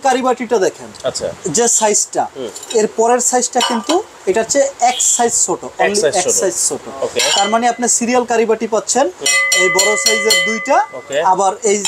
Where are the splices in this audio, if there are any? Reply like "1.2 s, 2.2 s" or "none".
none